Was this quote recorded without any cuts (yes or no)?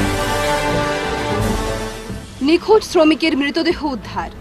yes